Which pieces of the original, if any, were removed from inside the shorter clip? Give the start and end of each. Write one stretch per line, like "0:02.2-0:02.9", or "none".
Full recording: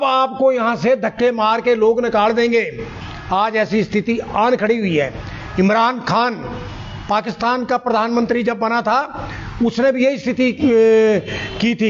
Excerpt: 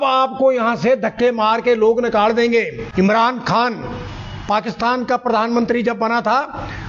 0:02.8-0:05.4

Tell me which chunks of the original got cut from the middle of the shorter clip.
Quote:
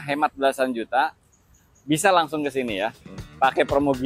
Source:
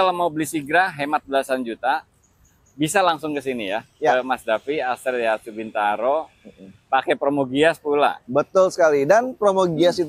0:03.9-0:06.5

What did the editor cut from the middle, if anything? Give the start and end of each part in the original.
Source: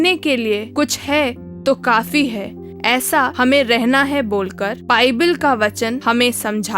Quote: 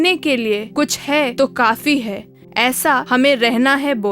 0:01.3-0:01.6

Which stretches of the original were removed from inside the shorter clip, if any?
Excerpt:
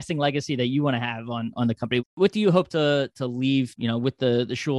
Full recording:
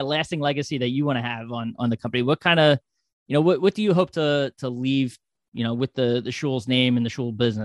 0:02.4-0:03.6
0:05.2-0:05.5

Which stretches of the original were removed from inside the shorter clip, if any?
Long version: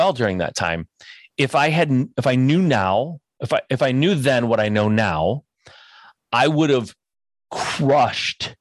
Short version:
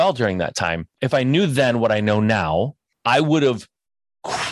0:01.0-0:03.7
0:05.5-0:06.1

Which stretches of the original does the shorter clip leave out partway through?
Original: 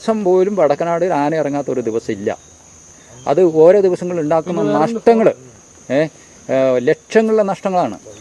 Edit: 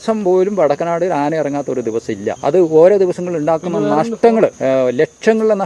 0:02.4-0:03.2
0:05.4-0:06.4

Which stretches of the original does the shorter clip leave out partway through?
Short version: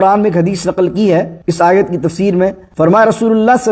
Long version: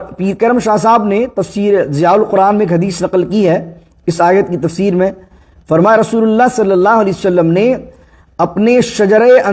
0:03.7-0:04.0
0:05.2-0:05.6

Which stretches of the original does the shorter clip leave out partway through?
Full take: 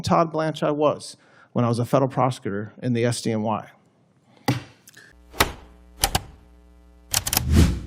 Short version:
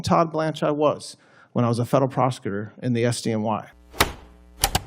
0:03.8-0:05.2

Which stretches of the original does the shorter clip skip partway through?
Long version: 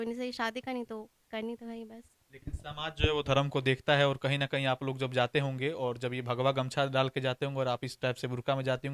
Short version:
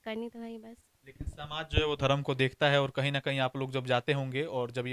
none

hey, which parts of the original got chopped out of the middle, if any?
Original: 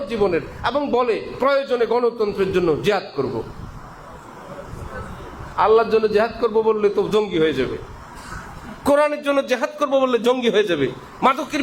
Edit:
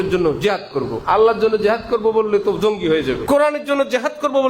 0:03.4-0:05.5
0:07.7-0:08.8

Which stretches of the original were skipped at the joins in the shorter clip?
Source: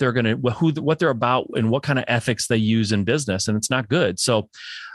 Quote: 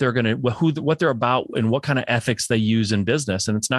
none

